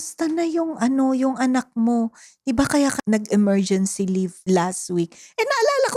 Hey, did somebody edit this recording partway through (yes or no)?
yes